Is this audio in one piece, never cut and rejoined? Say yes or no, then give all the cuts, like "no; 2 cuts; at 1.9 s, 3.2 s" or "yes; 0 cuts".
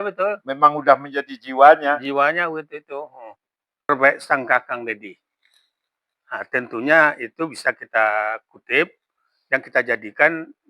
no; 1 cut; at 3.9 s